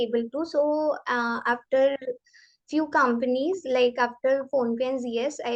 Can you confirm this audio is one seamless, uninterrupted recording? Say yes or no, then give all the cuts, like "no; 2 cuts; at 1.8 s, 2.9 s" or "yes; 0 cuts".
yes; 0 cuts